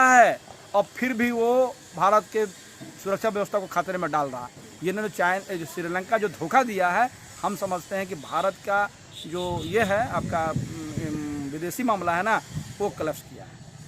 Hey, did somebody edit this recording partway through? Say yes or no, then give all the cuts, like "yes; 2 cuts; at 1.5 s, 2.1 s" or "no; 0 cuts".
no; 0 cuts